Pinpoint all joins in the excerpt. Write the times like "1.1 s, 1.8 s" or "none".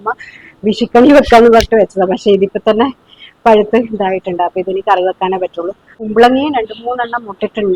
6.0 s